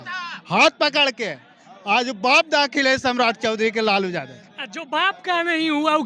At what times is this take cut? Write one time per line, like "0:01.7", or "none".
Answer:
none